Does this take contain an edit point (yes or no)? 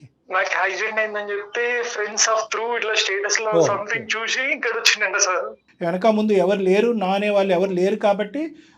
no